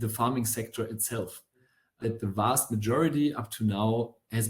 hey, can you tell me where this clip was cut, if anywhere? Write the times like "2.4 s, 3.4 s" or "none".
1.8 s